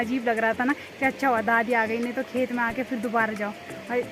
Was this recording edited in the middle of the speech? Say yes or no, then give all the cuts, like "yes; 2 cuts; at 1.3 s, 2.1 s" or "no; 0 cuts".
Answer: no; 0 cuts